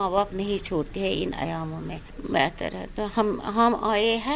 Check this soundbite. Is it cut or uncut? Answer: uncut